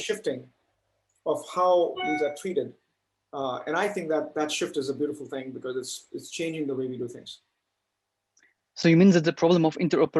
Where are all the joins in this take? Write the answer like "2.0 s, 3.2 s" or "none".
none